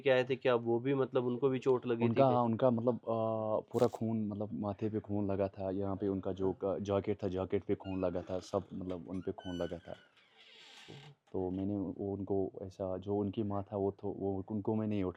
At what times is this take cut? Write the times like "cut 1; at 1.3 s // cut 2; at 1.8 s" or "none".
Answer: none